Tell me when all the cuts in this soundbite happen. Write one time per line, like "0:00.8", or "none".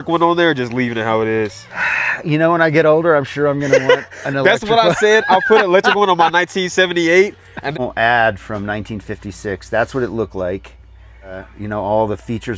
0:07.7
0:11.5